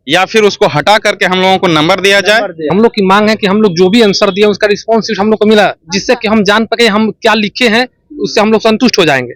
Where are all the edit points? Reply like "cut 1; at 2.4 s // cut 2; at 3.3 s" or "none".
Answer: cut 1; at 2.7 s